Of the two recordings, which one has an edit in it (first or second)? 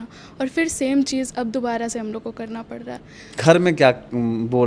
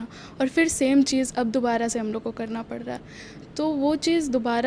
first